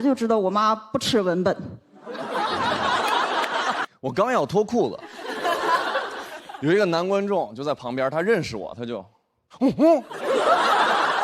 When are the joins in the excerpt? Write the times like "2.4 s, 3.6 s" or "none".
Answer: 3.8 s